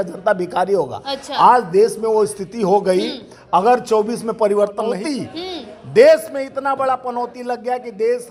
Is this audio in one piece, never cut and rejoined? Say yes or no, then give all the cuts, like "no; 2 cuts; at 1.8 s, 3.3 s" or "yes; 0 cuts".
no; 1 cut; at 5.0 s